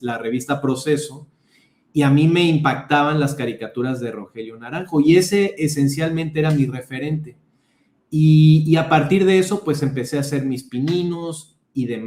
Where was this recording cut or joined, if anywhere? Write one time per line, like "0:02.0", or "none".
none